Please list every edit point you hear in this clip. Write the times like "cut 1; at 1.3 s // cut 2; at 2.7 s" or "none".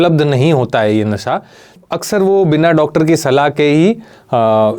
cut 1; at 1.8 s